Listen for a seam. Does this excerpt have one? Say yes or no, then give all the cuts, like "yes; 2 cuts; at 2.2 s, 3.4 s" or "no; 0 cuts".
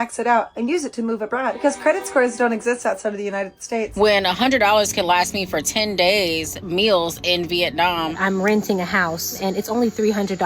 yes; 3 cuts; at 1.5 s, 3.9 s, 8.2 s